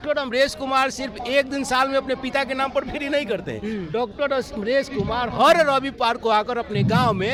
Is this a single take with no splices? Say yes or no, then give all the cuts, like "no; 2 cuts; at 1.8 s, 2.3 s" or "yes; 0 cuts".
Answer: yes; 0 cuts